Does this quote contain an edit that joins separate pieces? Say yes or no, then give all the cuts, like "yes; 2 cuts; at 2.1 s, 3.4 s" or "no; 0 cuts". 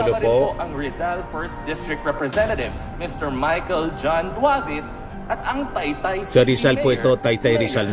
no; 0 cuts